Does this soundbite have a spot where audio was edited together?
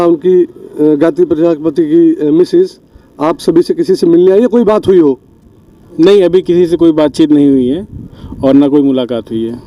no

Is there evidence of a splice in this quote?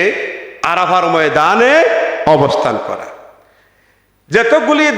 no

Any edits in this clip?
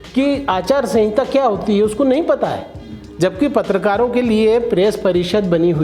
no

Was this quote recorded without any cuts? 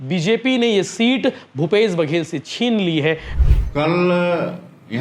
no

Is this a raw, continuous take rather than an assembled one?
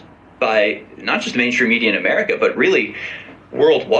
yes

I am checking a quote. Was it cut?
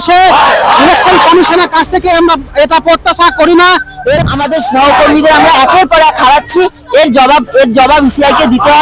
yes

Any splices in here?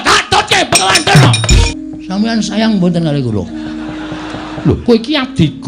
yes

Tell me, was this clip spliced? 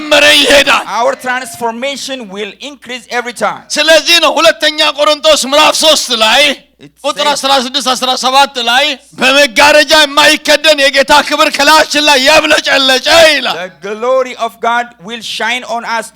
yes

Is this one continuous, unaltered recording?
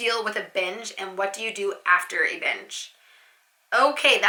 yes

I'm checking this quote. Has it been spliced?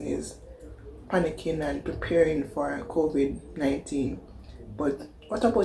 no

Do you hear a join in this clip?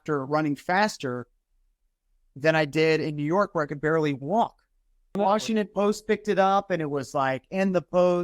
yes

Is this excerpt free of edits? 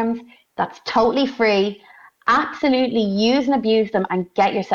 yes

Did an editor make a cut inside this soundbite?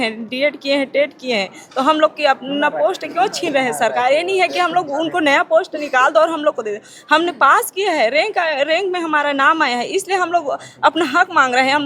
no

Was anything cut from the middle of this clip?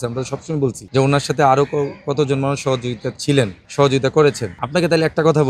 yes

